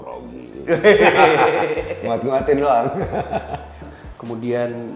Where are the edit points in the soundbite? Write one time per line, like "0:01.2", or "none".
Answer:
0:03.8